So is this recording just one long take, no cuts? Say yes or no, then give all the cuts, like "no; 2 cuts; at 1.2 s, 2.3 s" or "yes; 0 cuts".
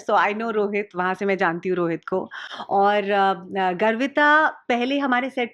yes; 0 cuts